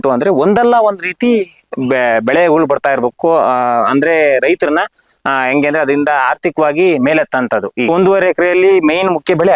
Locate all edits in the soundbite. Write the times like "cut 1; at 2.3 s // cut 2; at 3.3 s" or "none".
cut 1; at 7.9 s